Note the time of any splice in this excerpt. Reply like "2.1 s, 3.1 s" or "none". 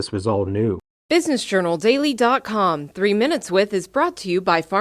0.9 s